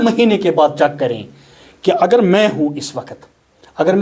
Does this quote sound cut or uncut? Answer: uncut